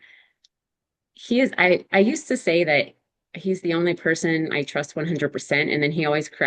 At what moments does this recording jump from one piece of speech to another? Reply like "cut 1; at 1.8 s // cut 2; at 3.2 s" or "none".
none